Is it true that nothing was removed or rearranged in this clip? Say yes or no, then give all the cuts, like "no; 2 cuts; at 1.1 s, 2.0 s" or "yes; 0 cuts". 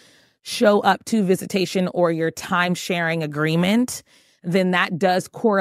yes; 0 cuts